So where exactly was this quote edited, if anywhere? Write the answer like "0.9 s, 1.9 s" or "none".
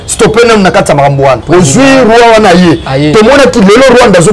1.4 s